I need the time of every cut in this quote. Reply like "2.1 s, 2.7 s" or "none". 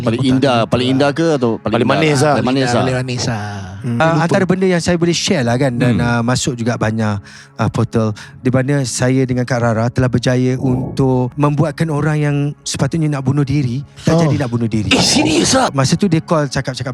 4.0 s, 11.3 s, 15.7 s